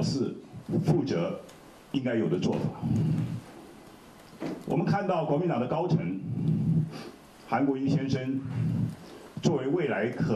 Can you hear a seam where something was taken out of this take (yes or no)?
no